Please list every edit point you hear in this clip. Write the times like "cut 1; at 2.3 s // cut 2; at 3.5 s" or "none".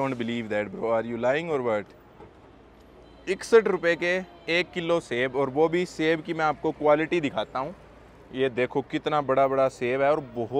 none